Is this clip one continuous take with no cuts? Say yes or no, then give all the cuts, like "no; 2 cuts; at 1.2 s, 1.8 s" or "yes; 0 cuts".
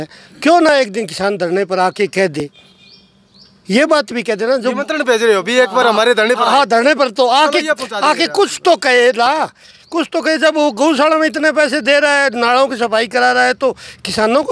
yes; 0 cuts